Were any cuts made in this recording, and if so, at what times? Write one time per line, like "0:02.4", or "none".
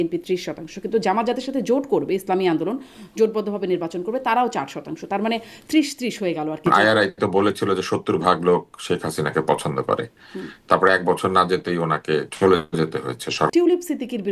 0:06.7
0:13.5